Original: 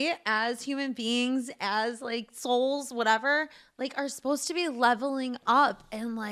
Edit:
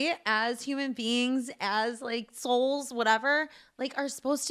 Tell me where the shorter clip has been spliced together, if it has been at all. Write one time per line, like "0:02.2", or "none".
none